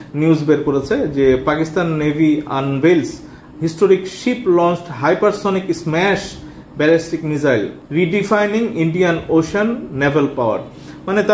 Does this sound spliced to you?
no; 0 cuts

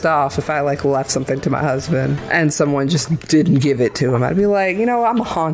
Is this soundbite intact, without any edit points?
no; 1 cut; at 2.2 s

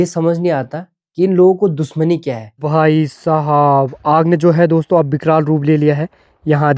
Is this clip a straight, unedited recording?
no; 1 cut; at 2.6 s

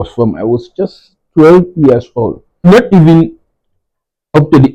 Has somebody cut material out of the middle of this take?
yes; 1 cut; at 2.7 s

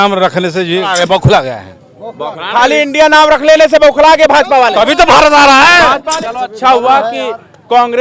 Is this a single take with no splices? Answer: no; 2 cuts; at 0.9 s, 6.0 s

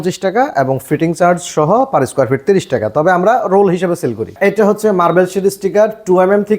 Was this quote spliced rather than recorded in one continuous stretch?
yes; 1 cut; at 4.3 s

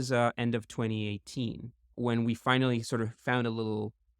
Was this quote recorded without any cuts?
no; 2 cuts; at 1.8 s, 3.2 s

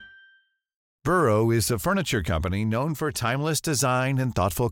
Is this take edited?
yes; 1 cut; at 1.0 s

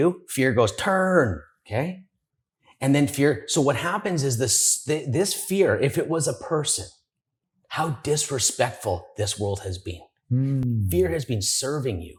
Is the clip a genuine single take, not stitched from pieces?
yes; 0 cuts

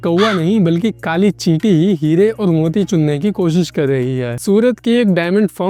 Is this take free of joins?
yes; 0 cuts

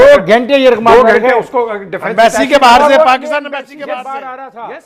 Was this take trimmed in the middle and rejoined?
no; 0 cuts

